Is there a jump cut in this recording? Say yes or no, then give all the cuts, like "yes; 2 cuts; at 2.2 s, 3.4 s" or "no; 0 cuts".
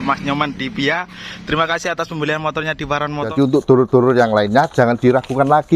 yes; 1 cut; at 3.3 s